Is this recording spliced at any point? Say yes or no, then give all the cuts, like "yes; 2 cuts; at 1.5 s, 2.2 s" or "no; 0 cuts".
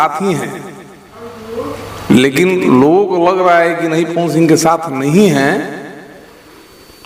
no; 0 cuts